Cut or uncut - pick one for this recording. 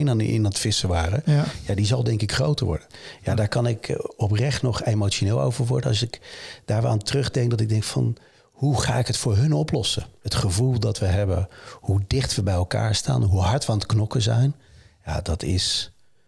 cut